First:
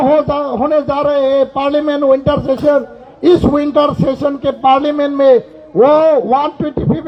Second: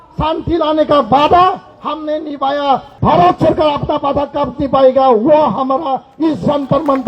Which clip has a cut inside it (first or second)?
second